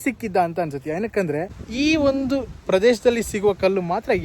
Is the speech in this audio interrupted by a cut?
yes; 1 cut; at 1.6 s

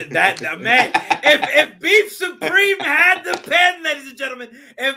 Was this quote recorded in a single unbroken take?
yes; 0 cuts

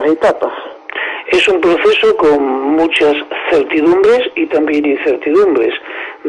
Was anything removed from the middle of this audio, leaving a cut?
yes; 1 cut; at 4.8 s

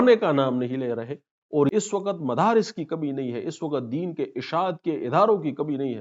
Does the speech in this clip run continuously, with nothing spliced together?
no; 1 cut; at 1.7 s

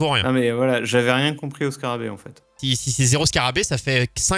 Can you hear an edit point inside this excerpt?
yes; 1 cut; at 2.6 s

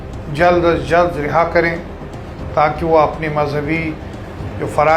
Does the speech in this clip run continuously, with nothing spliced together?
yes; 0 cuts

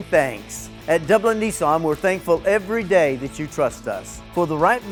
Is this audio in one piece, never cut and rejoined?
yes; 0 cuts

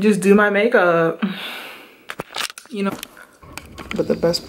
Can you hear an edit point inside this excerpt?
yes; 1 cut; at 2.9 s

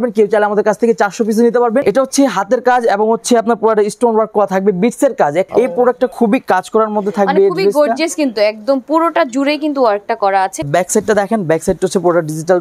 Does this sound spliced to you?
yes; 3 cuts; at 1.8 s, 5.5 s, 10.7 s

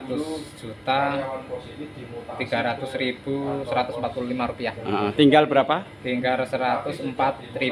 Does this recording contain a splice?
no; 0 cuts

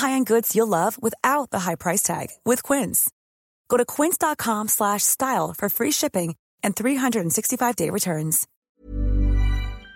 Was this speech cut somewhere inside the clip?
yes; 1 cut; at 8.5 s

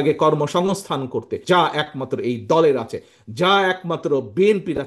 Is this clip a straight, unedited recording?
no; 1 cut; at 1.3 s

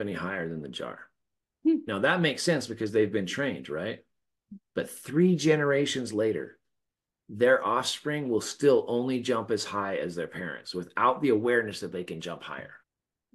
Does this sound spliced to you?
yes; 1 cut; at 1.8 s

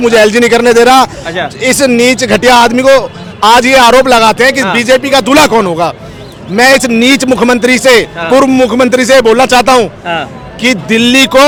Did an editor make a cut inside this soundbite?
no; 0 cuts

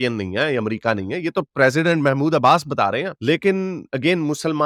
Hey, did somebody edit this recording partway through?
no; 0 cuts

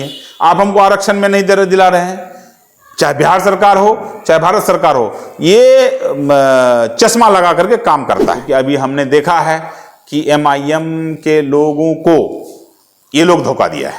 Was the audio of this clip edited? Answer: yes; 1 cut; at 8.4 s

